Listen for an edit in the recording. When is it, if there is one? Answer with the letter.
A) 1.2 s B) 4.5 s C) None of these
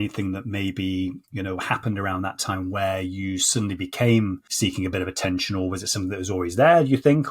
B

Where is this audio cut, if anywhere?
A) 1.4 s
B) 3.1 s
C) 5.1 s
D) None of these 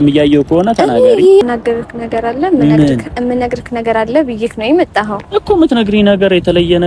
A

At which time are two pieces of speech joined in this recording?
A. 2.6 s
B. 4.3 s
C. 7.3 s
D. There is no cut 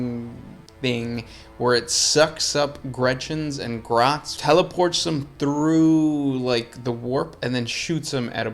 B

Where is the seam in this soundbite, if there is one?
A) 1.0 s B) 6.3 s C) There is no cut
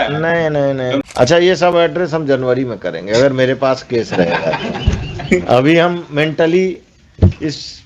A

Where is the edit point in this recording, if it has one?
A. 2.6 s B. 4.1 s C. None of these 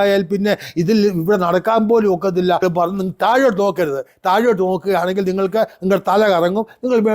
A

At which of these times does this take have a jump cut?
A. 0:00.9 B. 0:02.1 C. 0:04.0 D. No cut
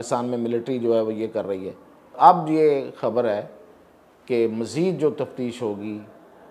B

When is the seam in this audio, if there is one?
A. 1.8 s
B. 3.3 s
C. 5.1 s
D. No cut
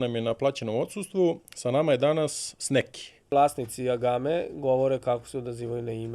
B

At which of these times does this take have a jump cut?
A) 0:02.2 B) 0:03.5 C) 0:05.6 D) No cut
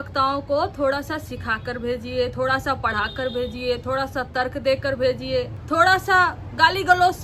C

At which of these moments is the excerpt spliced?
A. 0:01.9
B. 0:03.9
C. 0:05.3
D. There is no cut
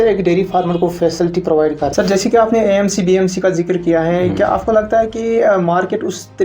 A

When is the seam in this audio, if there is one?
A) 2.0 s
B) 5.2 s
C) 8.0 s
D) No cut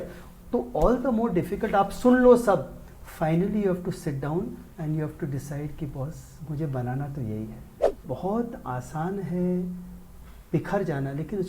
C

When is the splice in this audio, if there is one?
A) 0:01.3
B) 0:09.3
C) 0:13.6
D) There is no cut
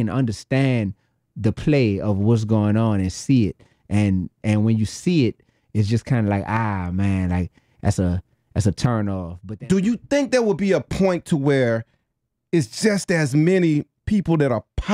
B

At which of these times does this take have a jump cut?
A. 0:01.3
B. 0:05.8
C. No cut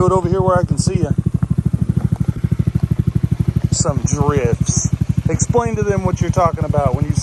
C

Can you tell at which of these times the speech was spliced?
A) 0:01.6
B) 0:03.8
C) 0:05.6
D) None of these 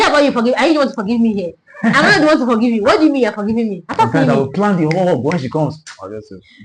B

